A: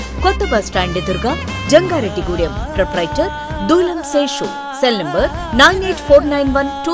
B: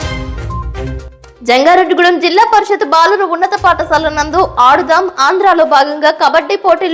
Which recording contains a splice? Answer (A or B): B